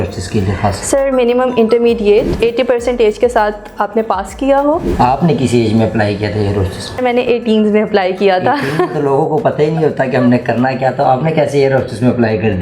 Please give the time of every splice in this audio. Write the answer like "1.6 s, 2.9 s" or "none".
2.3 s, 4.9 s, 7.0 s

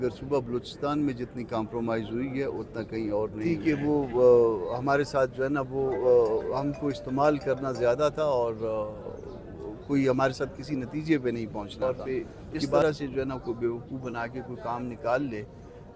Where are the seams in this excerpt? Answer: 3.5 s, 11.8 s

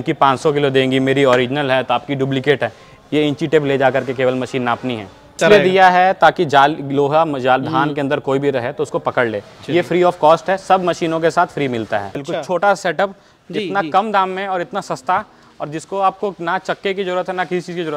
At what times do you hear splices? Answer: 5.4 s, 12.2 s

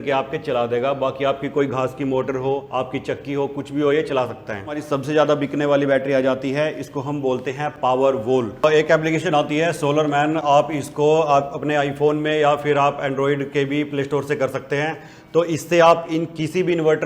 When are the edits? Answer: 2.7 s, 4.8 s, 8.6 s

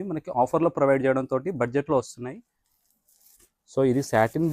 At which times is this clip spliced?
2.3 s

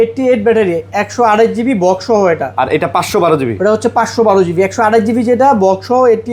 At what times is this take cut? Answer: none

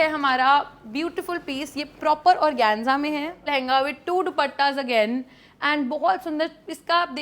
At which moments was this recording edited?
3.4 s

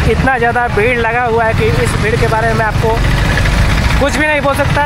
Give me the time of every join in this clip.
none

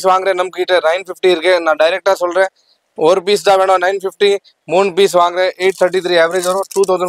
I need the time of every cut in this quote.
none

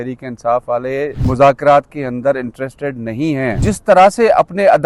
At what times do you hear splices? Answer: 1.2 s, 3.6 s

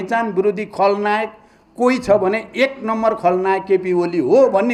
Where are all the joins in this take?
none

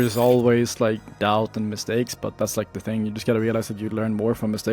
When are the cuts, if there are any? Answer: 1.1 s

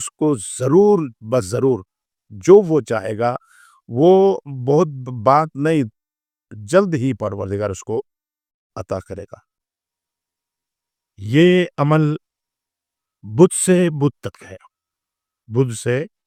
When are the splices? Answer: none

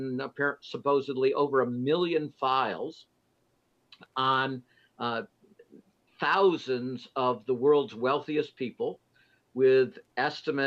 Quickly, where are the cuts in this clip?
none

